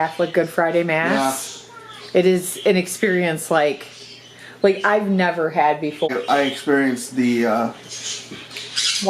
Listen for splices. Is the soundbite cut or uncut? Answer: cut